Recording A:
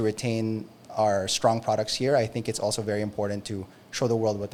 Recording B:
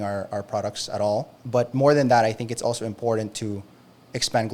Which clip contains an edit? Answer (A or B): B